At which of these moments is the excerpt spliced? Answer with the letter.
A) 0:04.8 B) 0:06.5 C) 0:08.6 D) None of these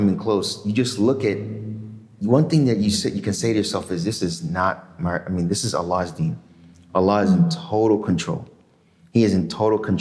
D